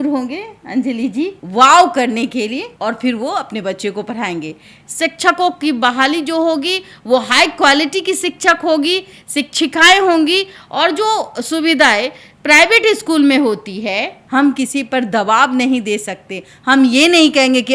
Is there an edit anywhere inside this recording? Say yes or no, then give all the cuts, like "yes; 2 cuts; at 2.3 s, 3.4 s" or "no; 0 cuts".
yes; 4 cuts; at 1.4 s, 2.7 s, 4.8 s, 14.2 s